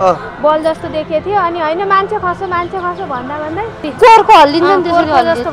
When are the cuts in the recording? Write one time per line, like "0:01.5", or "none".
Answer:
0:03.9